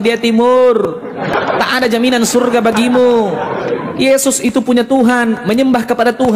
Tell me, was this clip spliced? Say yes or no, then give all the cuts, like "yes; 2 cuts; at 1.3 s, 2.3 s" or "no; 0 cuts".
yes; 1 cut; at 1.3 s